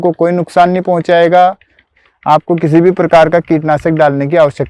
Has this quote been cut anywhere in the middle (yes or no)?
yes